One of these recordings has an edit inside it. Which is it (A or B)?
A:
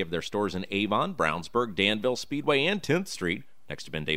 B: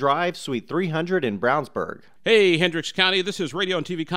B